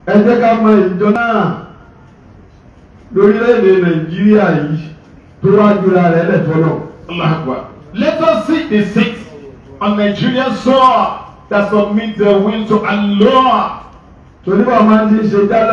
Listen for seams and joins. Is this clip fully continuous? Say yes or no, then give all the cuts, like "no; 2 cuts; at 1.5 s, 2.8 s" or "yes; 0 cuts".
no; 1 cut; at 1.1 s